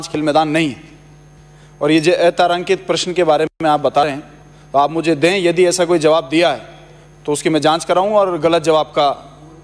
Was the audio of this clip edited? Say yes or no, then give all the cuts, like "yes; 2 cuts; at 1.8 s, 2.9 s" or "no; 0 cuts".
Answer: no; 0 cuts